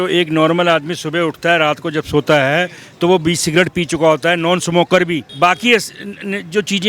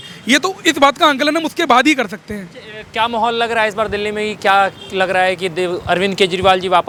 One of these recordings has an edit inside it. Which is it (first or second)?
first